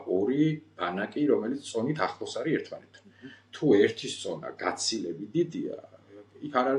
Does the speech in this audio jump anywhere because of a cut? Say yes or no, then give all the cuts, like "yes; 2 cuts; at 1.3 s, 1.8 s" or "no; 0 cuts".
no; 0 cuts